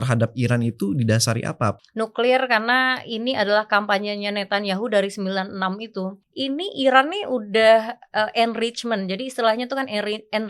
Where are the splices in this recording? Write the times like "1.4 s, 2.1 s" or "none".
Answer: 1.8 s, 6.2 s